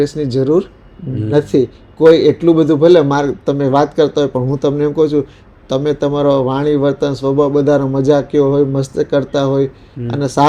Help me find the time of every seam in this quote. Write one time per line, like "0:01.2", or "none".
none